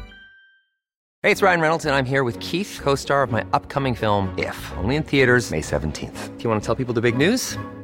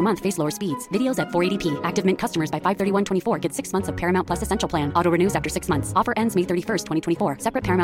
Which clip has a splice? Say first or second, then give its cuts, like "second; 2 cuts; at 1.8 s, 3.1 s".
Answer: first; 1 cut; at 1.0 s